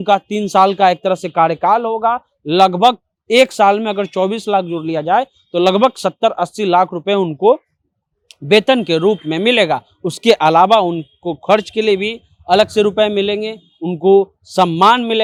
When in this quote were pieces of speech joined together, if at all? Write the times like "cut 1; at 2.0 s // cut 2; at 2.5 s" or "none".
none

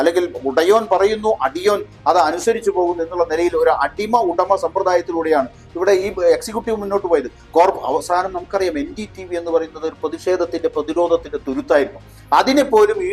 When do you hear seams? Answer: cut 1; at 7.4 s

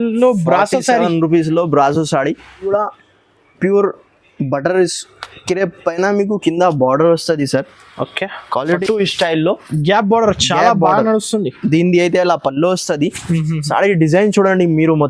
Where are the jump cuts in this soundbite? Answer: cut 1; at 2.2 s // cut 2; at 8.8 s

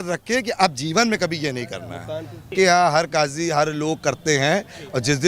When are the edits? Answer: cut 1; at 2.5 s

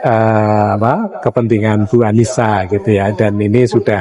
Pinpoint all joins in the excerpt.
none

